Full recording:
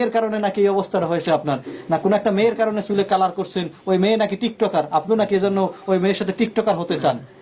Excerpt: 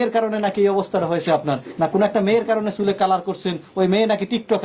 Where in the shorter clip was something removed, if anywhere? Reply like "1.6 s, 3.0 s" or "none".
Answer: 1.7 s